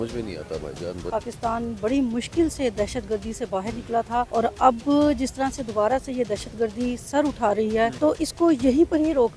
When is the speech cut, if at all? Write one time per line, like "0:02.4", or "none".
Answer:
0:01.1
0:04.3
0:07.9